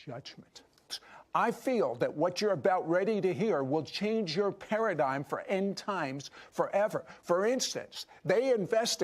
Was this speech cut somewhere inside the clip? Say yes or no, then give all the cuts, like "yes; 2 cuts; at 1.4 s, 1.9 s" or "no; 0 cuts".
yes; 1 cut; at 2.4 s